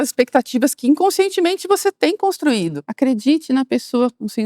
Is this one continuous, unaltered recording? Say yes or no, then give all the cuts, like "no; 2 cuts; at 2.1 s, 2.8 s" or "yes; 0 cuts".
no; 1 cut; at 2.8 s